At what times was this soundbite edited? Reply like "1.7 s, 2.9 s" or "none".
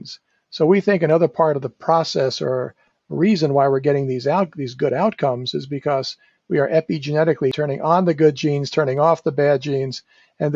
7.6 s